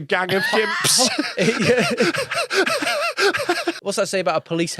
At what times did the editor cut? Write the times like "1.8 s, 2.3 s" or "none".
3.7 s